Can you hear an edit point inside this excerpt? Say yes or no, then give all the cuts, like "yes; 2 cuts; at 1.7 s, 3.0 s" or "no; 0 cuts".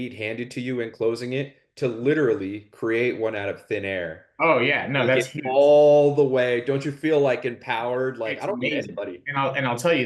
no; 0 cuts